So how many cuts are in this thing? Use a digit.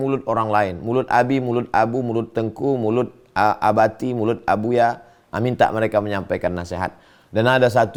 0